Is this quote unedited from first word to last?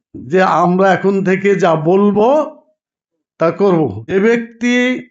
no; 1 cut; at 4.1 s

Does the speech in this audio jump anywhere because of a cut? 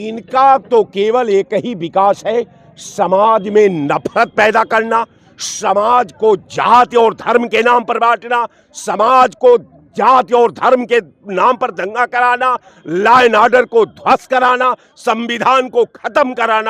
no; 0 cuts

